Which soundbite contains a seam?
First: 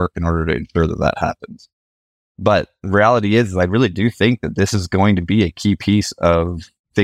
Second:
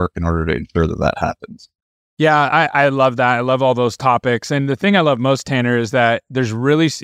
first; 1 cut; at 2.0 s

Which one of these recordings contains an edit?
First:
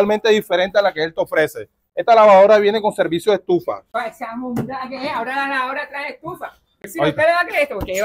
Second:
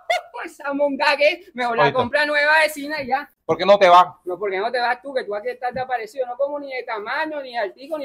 second; 1 cut; at 3.4 s

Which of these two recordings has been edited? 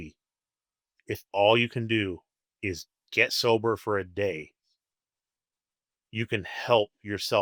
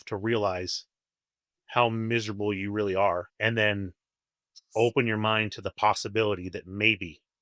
second; 1 cut; at 3.3 s

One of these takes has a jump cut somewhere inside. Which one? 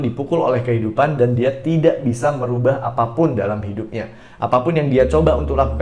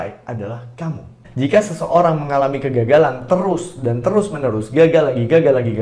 second; 1 cut; at 1.2 s

